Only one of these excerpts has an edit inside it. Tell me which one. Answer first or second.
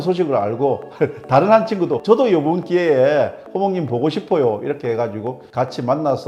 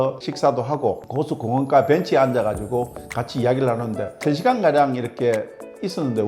second